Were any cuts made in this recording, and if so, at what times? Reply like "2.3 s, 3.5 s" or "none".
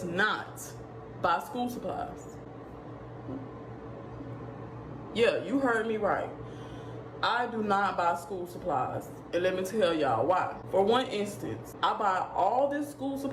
none